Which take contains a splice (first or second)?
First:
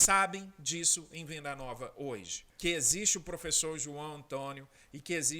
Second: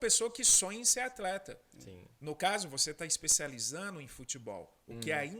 first